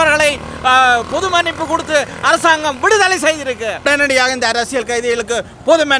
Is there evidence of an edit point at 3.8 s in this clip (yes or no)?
yes